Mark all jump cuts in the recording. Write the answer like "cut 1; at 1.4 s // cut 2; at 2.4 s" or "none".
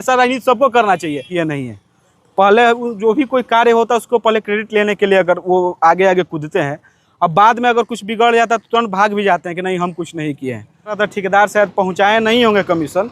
cut 1; at 1.2 s // cut 2; at 11.0 s